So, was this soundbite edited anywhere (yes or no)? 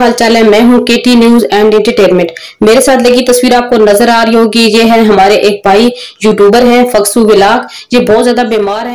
no